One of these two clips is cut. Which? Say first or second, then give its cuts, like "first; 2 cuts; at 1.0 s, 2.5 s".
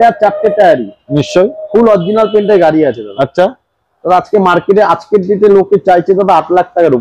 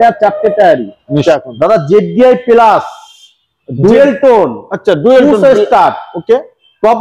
second; 1 cut; at 1.2 s